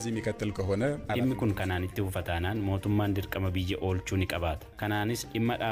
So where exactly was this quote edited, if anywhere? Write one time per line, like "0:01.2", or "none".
0:01.1
0:04.7